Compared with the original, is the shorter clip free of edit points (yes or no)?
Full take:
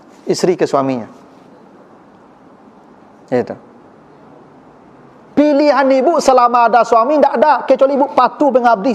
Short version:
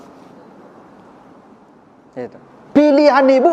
no